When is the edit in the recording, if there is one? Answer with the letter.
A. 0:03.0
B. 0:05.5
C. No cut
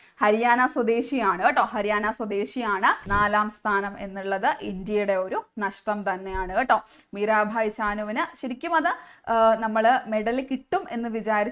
A